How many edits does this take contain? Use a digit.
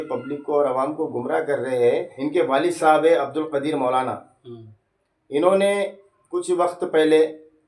1